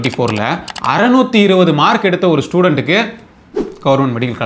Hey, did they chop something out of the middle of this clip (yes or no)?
no